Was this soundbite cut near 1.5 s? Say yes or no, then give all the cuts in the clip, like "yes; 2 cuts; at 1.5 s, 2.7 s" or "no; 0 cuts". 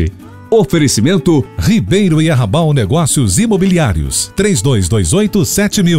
yes; 1 cut; at 1.5 s